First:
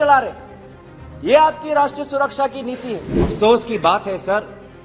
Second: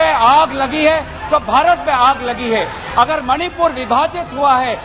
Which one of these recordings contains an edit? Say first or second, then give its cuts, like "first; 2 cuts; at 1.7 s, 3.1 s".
first; 1 cut; at 3.2 s